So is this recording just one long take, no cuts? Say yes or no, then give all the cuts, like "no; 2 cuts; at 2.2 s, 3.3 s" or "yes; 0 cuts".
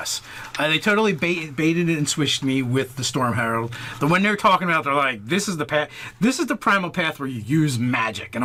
yes; 0 cuts